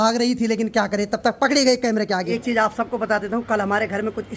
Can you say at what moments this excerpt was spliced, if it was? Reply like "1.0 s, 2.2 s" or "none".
2.3 s